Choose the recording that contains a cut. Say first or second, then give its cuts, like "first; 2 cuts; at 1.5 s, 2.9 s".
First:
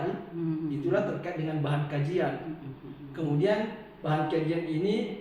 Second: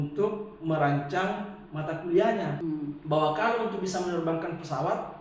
second; 1 cut; at 2.6 s